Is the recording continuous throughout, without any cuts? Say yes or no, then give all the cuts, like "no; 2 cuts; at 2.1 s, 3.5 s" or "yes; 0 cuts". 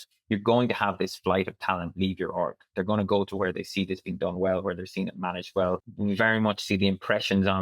no; 1 cut; at 5.9 s